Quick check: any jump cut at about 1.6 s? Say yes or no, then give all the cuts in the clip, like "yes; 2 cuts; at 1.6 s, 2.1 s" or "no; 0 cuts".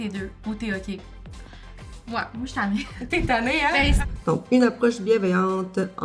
no; 1 cut; at 4.0 s